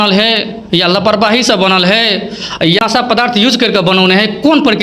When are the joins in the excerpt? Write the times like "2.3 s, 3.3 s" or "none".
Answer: 2.8 s